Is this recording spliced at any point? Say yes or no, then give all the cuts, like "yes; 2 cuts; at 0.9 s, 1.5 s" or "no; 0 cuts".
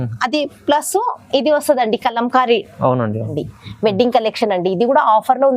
yes; 1 cut; at 3.3 s